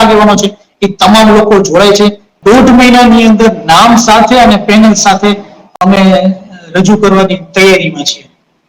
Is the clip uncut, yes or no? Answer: no